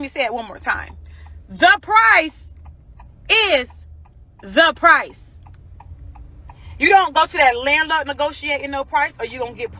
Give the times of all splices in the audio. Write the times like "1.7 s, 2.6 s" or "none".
none

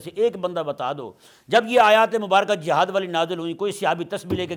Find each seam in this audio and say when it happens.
none

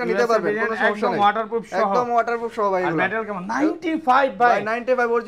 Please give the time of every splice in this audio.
none

